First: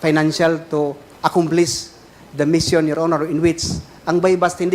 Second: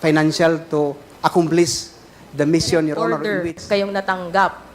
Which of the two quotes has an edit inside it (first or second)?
second